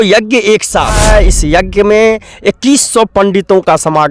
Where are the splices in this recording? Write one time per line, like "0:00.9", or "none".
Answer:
0:01.0